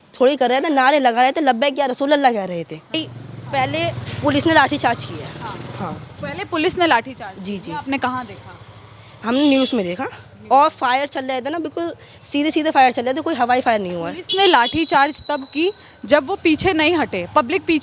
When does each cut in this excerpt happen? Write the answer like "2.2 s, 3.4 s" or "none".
3.0 s